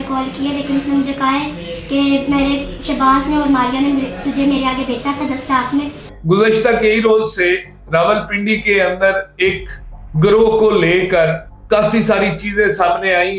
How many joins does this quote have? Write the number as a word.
one